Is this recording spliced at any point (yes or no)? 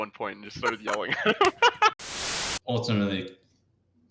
yes